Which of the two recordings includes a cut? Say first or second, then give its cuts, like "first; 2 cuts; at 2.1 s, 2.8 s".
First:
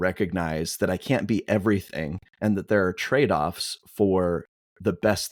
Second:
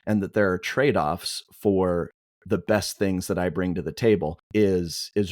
second; 1 cut; at 4.4 s